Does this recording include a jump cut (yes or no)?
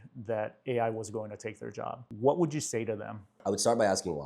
yes